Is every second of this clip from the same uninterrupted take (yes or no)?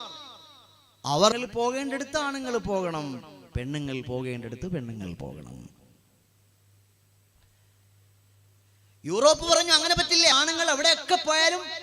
no